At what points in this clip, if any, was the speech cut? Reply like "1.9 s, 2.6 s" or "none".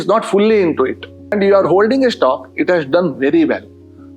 1.3 s